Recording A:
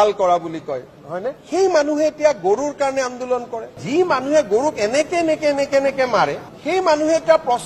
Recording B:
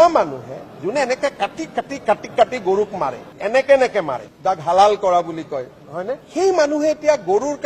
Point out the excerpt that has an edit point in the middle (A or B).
A